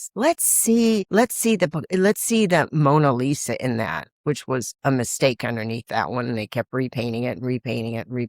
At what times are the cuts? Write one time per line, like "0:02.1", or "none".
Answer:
0:01.1